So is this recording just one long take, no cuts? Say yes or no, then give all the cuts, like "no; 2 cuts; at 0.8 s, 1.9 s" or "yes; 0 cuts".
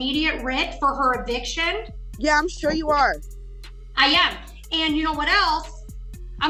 yes; 0 cuts